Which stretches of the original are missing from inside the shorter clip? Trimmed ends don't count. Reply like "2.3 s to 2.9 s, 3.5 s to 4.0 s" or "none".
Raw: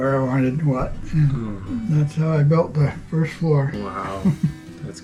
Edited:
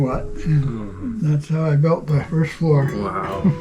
2.9 s to 3.1 s